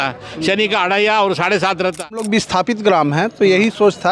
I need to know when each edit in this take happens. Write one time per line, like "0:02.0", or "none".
0:02.3